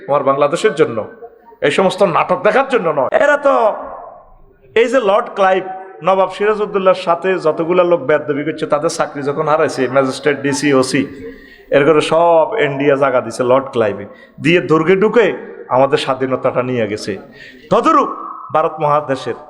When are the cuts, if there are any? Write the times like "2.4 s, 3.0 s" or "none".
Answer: 3.2 s